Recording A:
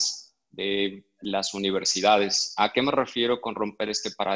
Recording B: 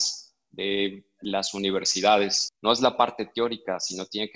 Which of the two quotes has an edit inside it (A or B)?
B